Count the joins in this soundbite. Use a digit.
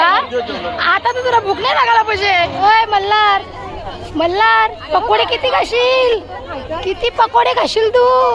1